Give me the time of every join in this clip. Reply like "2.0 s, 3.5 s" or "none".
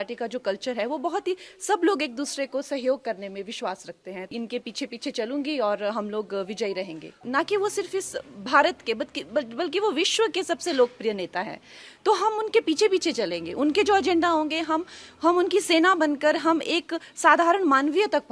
4.3 s, 7.1 s